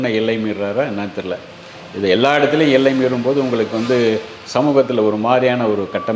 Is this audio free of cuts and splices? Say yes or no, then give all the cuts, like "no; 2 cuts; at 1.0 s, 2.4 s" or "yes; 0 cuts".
yes; 0 cuts